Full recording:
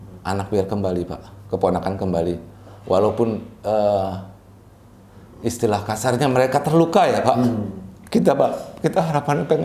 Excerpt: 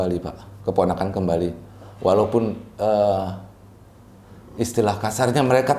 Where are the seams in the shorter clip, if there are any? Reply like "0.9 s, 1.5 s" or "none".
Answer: none